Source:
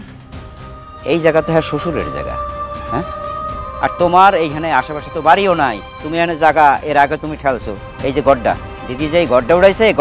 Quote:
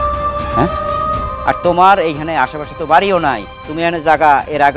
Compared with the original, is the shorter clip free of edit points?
yes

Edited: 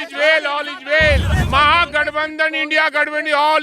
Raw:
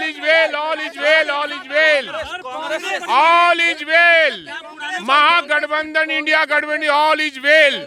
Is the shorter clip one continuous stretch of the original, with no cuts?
no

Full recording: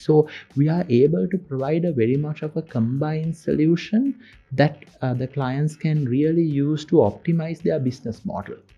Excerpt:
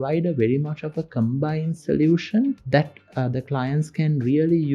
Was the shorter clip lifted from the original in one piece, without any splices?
no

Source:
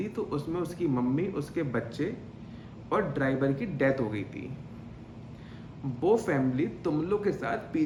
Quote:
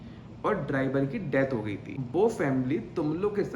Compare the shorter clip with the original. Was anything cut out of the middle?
yes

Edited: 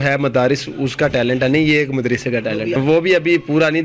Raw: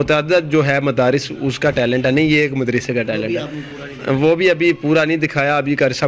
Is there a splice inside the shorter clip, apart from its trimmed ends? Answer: yes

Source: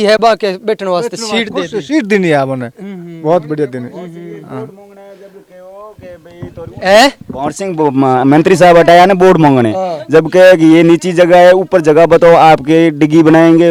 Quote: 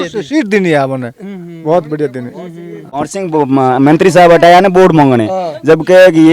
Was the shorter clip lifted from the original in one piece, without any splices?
no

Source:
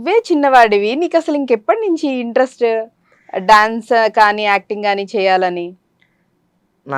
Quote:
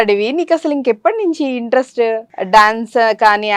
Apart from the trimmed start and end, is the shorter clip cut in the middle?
yes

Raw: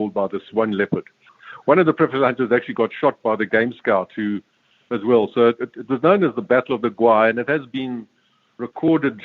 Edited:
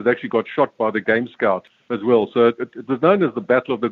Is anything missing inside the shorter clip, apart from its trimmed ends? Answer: yes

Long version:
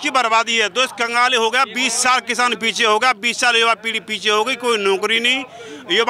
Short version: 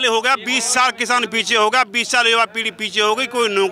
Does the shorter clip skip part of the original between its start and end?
no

